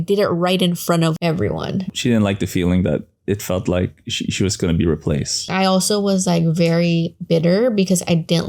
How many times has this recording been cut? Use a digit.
2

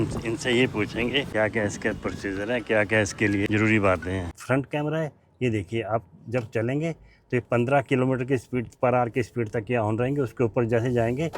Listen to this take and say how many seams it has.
3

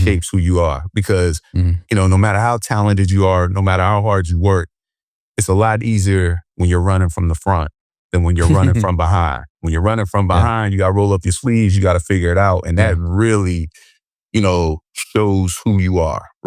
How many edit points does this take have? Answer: 0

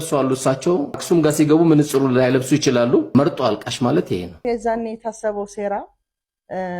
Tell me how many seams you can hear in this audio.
3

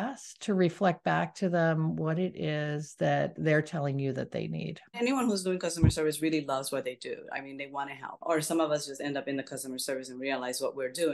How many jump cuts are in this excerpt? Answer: 2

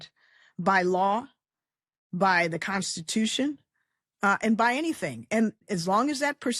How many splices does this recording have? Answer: 1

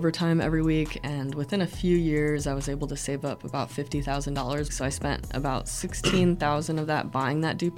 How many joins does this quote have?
1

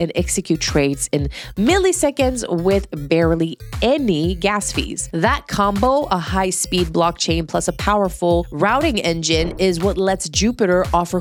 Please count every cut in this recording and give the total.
0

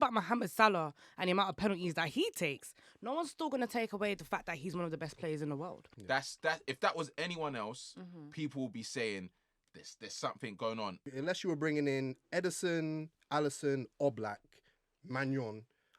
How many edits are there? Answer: 2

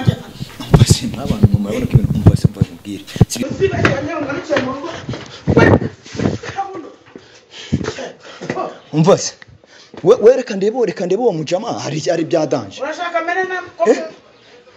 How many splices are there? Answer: 1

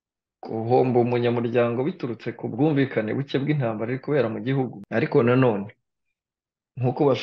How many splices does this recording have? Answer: 1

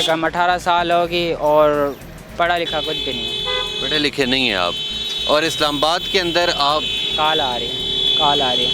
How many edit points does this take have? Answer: 0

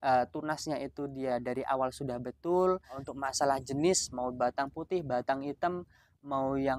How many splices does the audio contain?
1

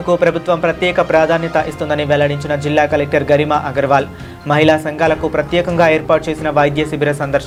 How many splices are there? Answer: 0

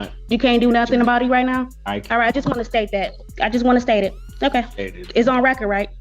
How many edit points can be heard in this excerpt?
2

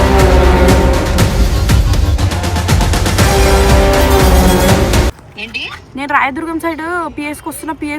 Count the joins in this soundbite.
1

